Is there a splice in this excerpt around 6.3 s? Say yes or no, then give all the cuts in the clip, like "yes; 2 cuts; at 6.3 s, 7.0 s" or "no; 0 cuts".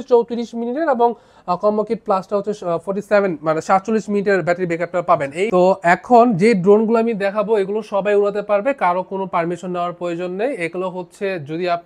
yes; 2 cuts; at 5.5 s, 6.3 s